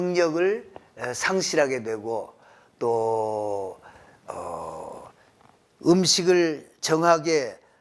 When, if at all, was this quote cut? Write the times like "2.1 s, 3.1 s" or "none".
none